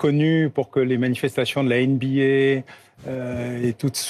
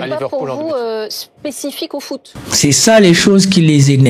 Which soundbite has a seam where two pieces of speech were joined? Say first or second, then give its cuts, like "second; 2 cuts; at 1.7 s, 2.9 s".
second; 1 cut; at 2.4 s